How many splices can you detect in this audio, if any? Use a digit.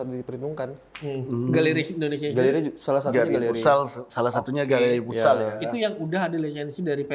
0